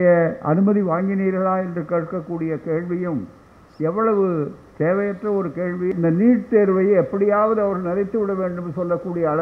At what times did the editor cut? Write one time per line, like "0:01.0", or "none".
0:05.9